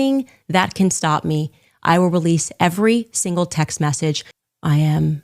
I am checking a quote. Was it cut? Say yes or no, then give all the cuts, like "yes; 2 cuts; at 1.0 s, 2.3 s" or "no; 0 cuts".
yes; 1 cut; at 4.3 s